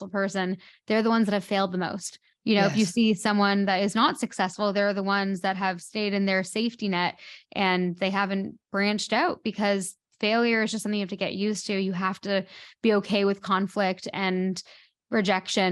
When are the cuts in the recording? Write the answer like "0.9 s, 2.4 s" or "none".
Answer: none